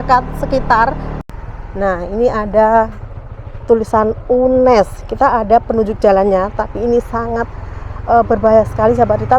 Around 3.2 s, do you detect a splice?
no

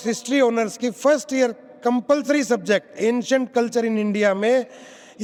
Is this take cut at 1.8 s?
no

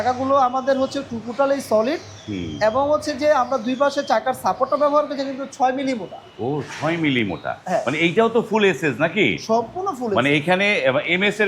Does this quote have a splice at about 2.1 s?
no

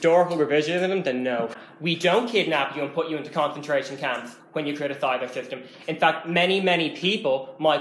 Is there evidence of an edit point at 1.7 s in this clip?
yes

